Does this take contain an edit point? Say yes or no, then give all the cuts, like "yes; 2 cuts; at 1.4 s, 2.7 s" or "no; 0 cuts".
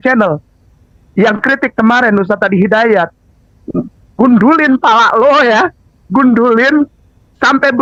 no; 0 cuts